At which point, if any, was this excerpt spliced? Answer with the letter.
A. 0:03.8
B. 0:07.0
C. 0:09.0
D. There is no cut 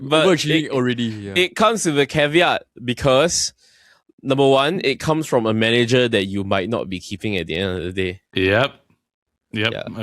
D